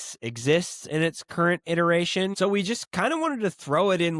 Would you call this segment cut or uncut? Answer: cut